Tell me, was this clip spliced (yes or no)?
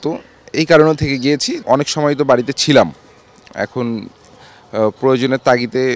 yes